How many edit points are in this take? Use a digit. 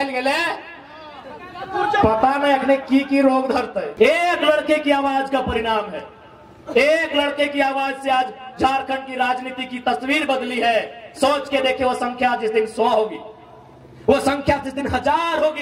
1